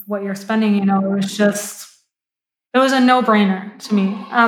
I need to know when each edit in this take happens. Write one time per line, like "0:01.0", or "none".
none